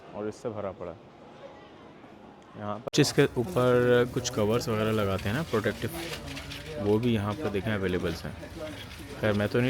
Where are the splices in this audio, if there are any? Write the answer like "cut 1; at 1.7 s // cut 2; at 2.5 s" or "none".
cut 1; at 2.9 s